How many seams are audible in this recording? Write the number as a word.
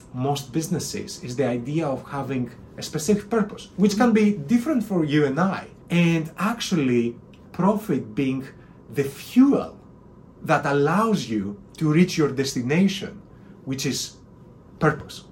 one